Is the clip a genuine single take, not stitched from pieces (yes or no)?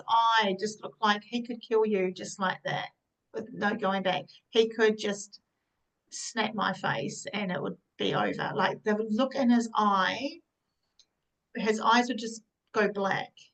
yes